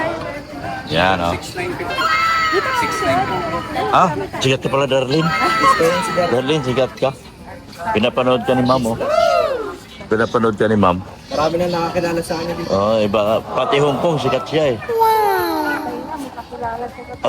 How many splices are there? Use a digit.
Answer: 1